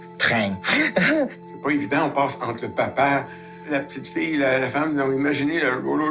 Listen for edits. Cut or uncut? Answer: cut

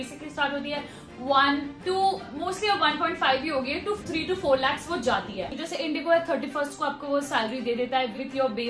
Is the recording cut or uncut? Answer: cut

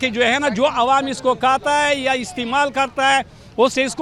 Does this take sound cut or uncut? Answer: uncut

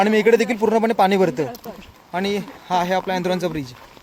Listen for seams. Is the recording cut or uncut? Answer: uncut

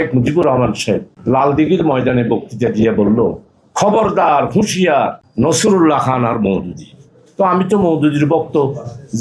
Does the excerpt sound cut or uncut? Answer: cut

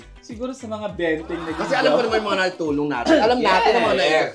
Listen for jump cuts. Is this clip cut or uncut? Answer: uncut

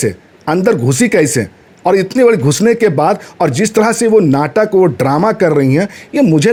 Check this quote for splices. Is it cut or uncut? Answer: uncut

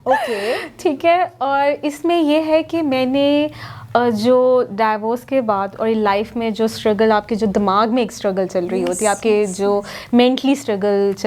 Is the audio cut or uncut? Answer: uncut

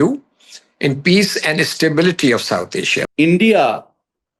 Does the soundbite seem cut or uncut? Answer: cut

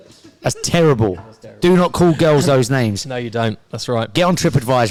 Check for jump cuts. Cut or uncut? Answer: uncut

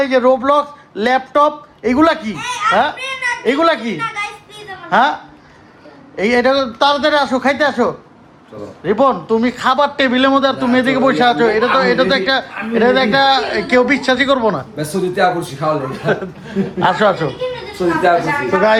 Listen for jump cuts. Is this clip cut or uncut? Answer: uncut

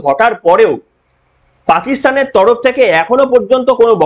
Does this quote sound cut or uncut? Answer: uncut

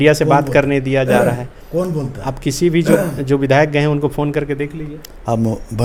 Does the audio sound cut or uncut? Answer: uncut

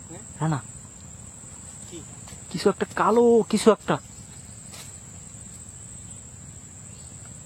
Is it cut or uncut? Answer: uncut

